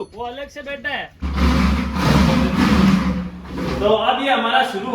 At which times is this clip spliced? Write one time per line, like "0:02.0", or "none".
0:01.2